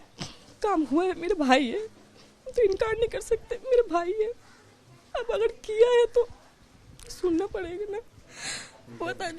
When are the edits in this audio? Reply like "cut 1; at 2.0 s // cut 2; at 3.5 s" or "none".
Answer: none